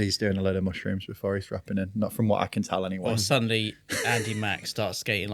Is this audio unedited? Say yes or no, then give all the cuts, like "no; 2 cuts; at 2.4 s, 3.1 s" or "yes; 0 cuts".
yes; 0 cuts